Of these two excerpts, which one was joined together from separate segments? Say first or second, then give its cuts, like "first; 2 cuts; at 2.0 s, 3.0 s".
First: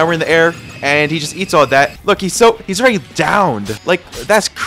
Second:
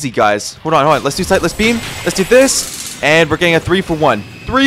first; 2 cuts; at 2.0 s, 3.7 s